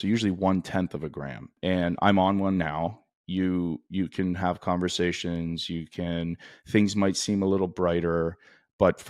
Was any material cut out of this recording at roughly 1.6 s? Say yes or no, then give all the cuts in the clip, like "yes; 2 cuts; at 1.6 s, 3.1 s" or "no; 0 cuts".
yes; 1 cut; at 1.6 s